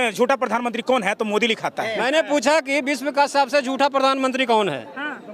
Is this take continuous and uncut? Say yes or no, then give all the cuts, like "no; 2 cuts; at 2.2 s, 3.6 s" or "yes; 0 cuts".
no; 1 cut; at 2.0 s